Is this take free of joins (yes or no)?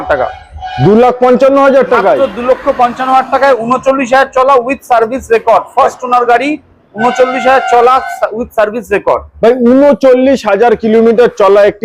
yes